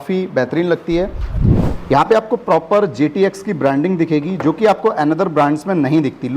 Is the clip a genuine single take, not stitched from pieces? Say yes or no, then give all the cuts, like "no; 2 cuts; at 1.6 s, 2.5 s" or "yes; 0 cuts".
no; 1 cut; at 1.2 s